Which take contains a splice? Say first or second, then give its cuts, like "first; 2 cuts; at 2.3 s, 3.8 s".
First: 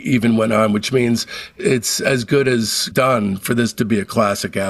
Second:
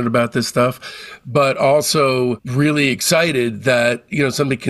first; 2 cuts; at 1.5 s, 2.8 s